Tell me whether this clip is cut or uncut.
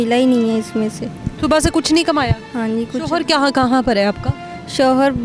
uncut